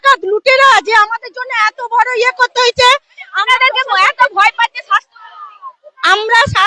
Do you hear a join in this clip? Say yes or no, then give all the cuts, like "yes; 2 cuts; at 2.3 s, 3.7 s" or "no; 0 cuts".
no; 0 cuts